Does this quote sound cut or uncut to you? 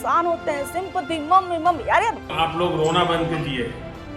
uncut